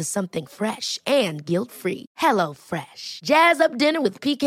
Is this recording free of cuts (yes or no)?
yes